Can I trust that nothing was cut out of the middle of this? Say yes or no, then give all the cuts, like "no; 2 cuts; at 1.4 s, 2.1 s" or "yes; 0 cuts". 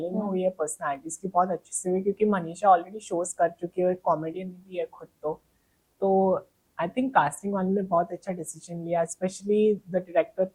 yes; 0 cuts